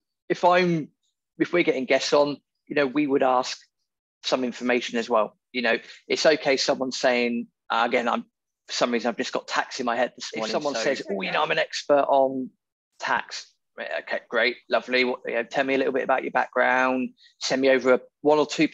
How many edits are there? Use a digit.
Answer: 1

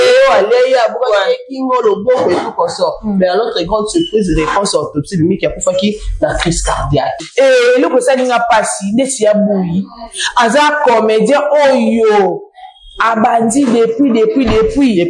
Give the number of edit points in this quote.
1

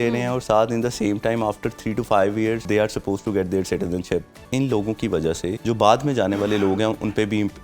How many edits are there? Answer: 3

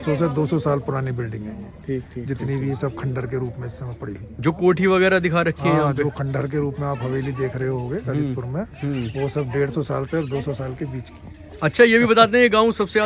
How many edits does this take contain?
0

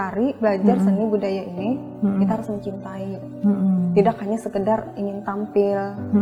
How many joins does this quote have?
0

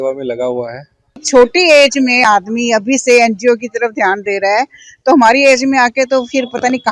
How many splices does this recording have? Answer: 1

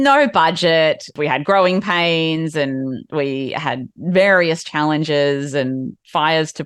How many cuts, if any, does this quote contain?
1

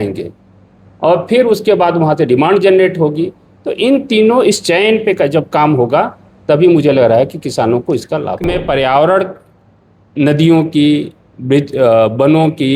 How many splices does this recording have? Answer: 1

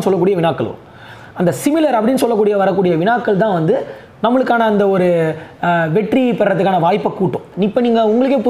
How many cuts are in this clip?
1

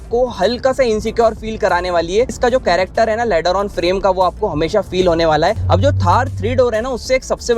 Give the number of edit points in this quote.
2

